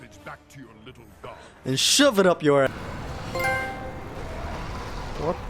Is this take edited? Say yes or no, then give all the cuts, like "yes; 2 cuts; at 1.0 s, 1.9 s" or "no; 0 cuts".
yes; 1 cut; at 2.7 s